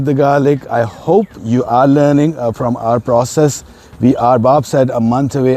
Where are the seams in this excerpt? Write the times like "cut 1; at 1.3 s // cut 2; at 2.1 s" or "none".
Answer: cut 1; at 1.4 s

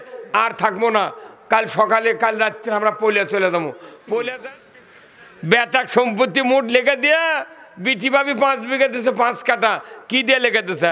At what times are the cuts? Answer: cut 1; at 4.4 s

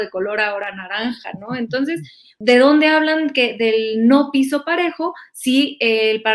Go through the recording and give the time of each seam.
cut 1; at 2.3 s

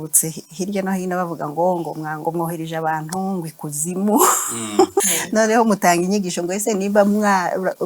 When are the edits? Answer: cut 1; at 5.2 s

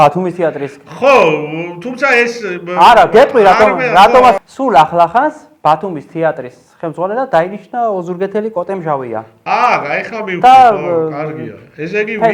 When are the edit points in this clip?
none

